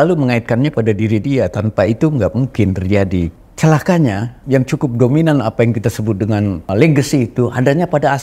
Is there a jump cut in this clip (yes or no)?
yes